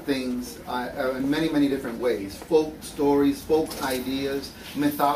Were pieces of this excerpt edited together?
yes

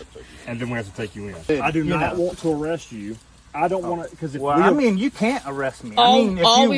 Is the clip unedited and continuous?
no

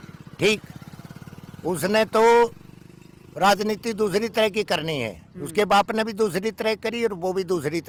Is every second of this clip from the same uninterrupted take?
yes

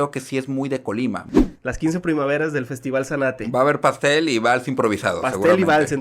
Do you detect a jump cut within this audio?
yes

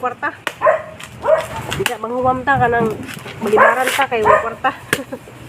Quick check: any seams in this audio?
yes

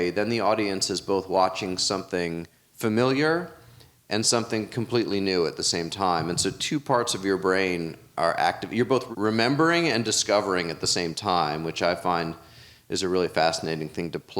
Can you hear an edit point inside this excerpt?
yes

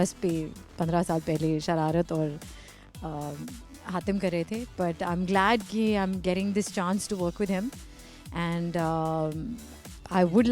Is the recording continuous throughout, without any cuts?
yes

